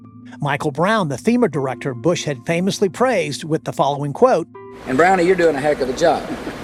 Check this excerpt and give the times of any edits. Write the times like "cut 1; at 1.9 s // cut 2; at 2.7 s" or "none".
none